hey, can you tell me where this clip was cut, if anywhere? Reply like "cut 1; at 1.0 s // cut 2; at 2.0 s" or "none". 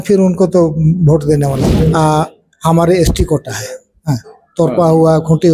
cut 1; at 1.6 s